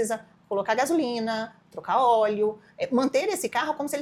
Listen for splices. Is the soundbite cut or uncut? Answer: uncut